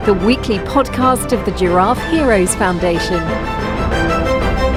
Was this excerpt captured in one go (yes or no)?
yes